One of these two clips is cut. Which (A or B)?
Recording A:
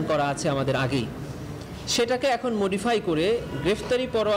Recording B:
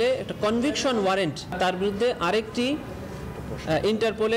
B